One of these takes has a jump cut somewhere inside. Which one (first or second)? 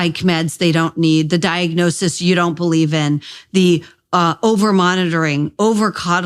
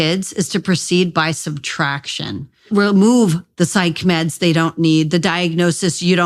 second